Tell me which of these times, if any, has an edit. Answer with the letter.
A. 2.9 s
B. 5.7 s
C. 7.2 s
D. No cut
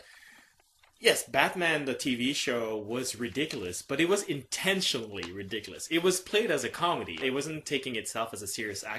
A